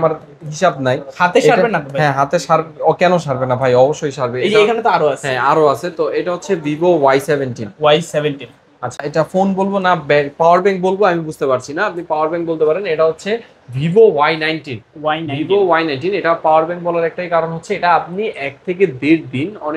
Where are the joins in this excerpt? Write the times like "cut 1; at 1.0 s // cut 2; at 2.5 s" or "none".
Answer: cut 1; at 9.0 s